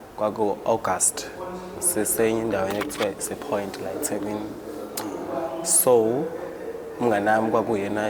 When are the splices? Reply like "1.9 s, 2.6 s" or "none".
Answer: none